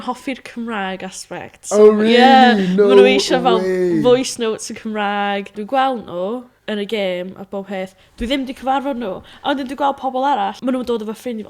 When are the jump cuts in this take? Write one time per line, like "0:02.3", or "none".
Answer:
0:05.6
0:10.6